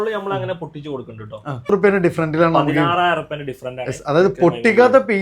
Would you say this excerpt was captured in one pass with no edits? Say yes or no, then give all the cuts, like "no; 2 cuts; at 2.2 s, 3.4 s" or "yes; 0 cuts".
no; 1 cut; at 1.6 s